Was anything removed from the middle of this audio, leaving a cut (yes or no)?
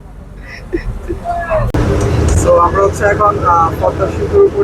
yes